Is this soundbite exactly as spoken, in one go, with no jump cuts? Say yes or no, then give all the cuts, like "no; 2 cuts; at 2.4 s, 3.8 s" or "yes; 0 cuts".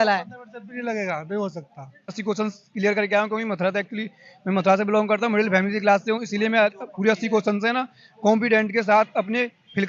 no; 1 cut; at 2.2 s